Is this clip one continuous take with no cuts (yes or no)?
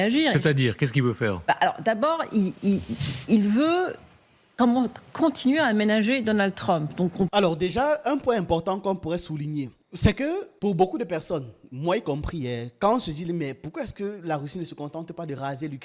yes